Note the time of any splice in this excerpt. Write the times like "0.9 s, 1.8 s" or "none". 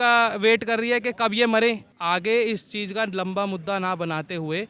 1.9 s